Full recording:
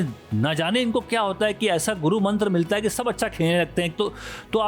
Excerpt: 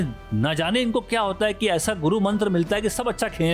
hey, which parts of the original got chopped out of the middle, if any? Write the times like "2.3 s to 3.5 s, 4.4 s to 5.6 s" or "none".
none